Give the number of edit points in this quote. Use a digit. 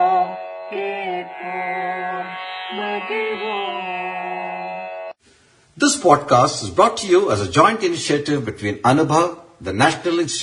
1